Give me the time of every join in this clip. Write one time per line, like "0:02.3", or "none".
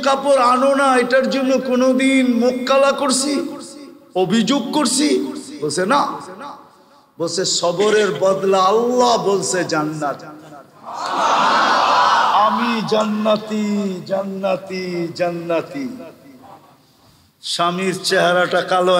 none

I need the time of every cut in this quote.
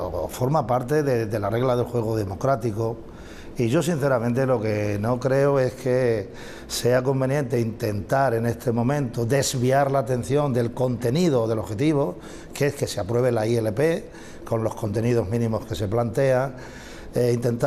0:09.0

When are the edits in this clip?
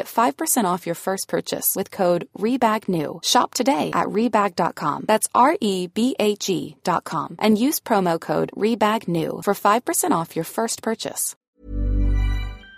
0:11.3

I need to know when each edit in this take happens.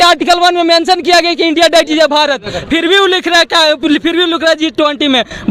none

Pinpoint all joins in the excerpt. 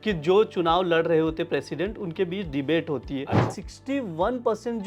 0:03.5

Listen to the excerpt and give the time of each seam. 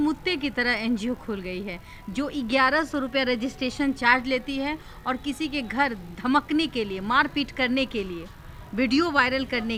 none

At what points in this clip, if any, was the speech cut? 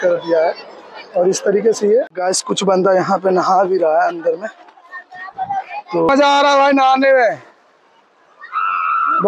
0:02.1
0:06.1

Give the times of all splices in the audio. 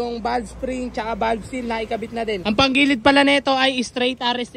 0:02.4

